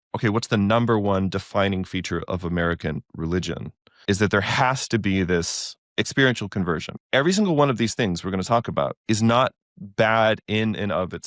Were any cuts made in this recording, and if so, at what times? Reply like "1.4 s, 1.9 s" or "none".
4.0 s, 5.8 s, 6.9 s